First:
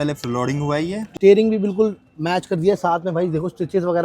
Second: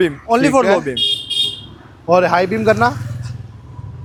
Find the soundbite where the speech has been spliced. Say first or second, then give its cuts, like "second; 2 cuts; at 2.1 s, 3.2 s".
first; 1 cut; at 1.0 s